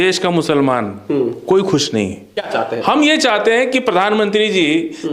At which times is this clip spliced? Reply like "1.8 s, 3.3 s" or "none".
2.4 s